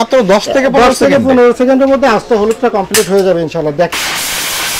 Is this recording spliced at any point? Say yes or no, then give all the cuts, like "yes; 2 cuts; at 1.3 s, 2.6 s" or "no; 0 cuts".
yes; 1 cut; at 3.9 s